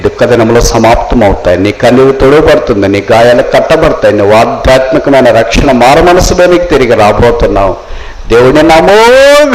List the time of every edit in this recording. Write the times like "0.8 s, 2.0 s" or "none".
none